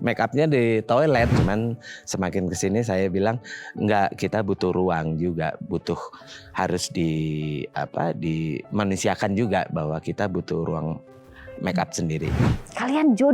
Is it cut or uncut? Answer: cut